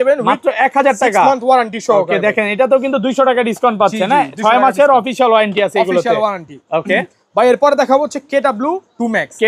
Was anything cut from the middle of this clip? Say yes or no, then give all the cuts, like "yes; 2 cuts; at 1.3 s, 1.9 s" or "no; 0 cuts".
no; 0 cuts